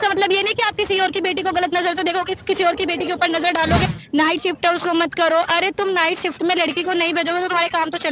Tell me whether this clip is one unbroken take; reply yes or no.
no